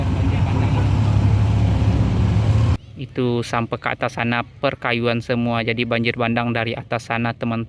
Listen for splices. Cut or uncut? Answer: cut